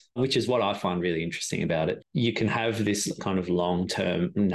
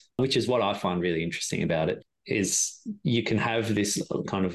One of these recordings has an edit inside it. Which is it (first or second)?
first